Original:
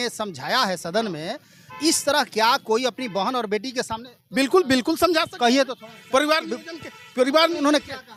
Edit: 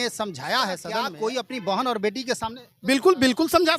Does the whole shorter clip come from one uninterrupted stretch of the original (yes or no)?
no